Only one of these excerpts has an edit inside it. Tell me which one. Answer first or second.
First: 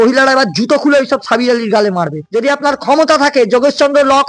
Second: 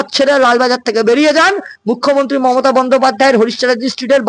first